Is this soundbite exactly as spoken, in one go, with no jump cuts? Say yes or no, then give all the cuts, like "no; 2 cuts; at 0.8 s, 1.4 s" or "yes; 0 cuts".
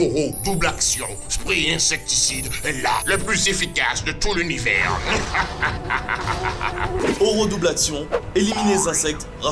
yes; 0 cuts